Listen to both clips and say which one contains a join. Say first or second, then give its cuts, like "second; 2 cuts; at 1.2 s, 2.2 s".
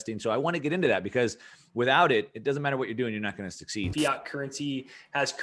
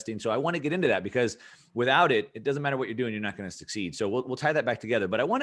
first; 1 cut; at 3.9 s